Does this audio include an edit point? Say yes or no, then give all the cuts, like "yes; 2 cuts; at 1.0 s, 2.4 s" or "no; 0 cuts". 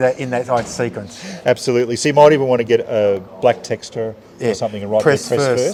no; 0 cuts